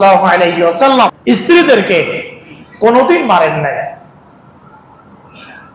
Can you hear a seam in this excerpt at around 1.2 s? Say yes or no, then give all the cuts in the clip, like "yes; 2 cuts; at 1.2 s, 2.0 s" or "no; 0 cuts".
yes; 1 cut; at 1.2 s